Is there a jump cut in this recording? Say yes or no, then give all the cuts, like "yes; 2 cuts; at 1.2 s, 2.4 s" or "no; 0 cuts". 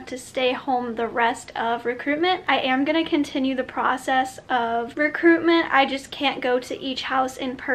no; 0 cuts